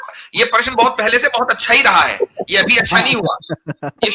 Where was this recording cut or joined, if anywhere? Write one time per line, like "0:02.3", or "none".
none

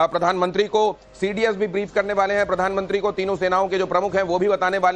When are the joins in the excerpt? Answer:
none

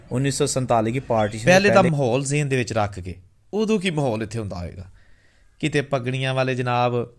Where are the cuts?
0:01.4

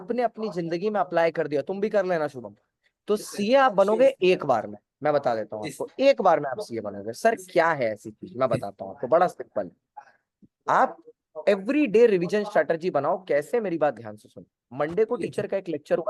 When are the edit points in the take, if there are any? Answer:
none

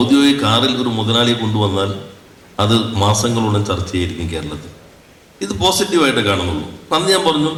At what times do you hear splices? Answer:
none

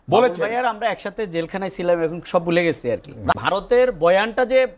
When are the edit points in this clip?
0:03.4

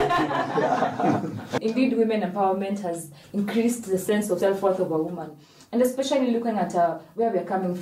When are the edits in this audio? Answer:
0:01.5
0:04.4

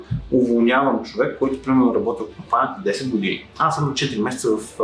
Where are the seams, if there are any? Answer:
none

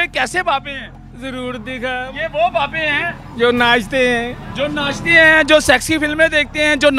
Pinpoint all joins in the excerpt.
none

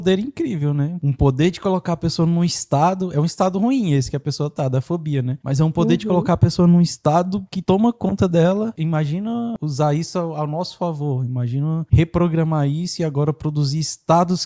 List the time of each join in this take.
0:01.0
0:07.5
0:09.6

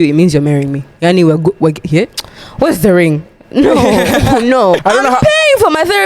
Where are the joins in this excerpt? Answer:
0:04.8

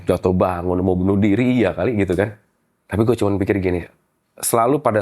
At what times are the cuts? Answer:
none

